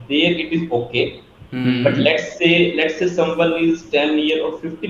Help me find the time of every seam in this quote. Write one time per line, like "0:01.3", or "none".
none

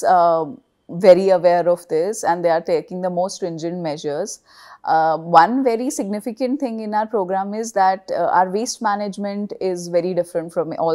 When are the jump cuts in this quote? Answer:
none

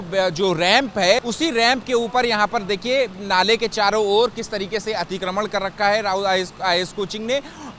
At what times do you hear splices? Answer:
0:01.2

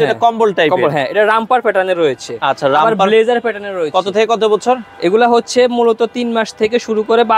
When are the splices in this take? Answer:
none

